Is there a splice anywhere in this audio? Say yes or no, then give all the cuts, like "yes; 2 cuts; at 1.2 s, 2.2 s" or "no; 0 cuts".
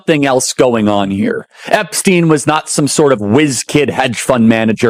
no; 0 cuts